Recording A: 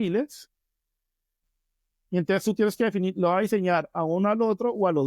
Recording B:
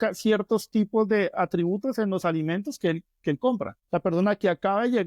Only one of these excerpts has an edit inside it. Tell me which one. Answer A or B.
B